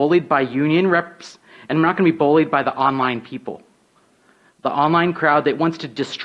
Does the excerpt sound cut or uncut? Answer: uncut